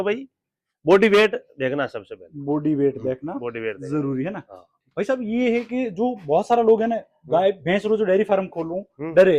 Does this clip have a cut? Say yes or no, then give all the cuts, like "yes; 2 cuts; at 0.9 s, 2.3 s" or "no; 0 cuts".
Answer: no; 0 cuts